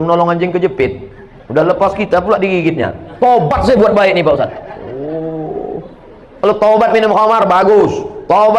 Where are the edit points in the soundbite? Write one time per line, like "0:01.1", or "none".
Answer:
none